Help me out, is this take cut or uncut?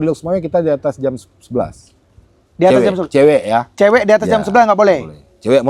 uncut